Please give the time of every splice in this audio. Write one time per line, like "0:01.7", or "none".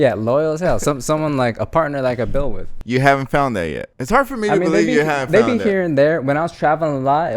0:02.8